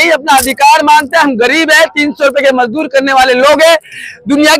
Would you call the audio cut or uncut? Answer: uncut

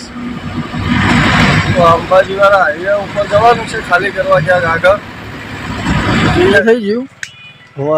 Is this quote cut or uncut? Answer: cut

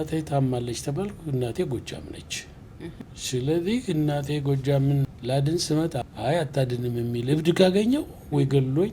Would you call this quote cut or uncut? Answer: cut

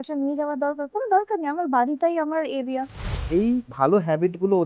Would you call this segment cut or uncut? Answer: cut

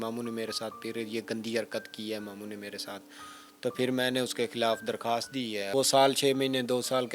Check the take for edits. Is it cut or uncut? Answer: cut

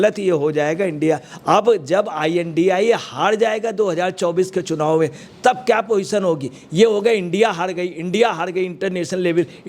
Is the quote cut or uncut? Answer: cut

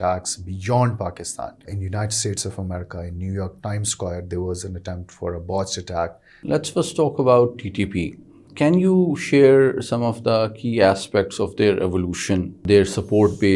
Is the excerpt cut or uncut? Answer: cut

